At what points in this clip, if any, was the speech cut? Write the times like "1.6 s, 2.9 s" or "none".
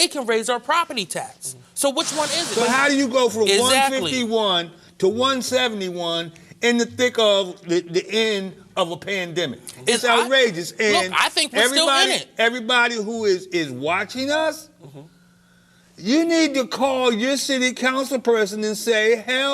2.4 s